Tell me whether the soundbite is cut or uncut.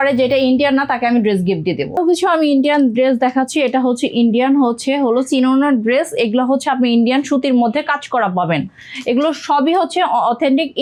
uncut